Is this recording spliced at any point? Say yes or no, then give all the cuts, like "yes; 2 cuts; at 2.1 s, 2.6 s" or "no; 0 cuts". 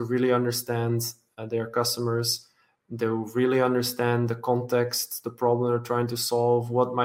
no; 0 cuts